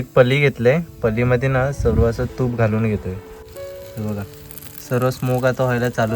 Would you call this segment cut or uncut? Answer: cut